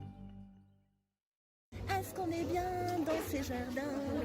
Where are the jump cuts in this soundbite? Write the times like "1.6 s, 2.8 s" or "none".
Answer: 1.7 s